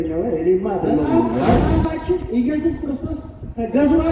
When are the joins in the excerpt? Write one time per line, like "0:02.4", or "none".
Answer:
0:01.7